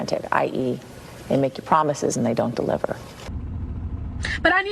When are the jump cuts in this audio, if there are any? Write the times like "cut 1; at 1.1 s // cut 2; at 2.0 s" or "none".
cut 1; at 3.1 s

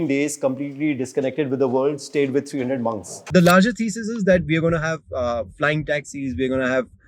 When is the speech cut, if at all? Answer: cut 1; at 3.1 s

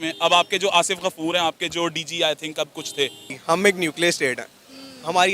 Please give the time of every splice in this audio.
cut 1; at 3.3 s

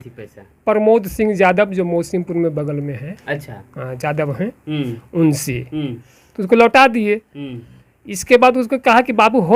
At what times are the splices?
none

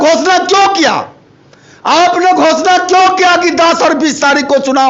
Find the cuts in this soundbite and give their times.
none

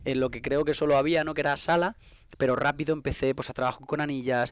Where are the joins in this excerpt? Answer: none

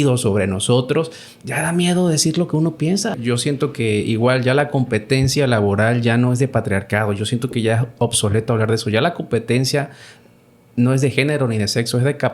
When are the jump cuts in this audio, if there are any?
cut 1; at 3.2 s

